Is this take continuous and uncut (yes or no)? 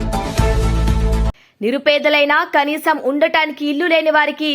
yes